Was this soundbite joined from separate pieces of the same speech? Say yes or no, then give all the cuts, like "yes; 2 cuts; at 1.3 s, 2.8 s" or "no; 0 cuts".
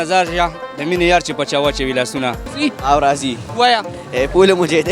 yes; 1 cut; at 2.4 s